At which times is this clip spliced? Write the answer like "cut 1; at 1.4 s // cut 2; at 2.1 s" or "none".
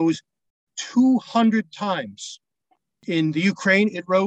cut 1; at 3.0 s